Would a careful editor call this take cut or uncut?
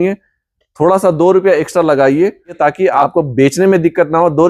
cut